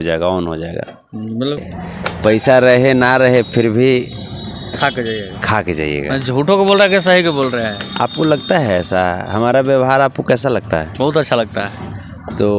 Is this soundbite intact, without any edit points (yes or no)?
no